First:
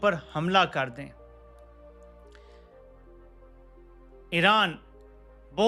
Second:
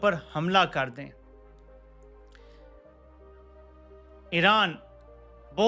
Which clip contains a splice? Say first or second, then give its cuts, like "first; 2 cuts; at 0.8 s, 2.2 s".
second; 2 cuts; at 1.4 s, 4.0 s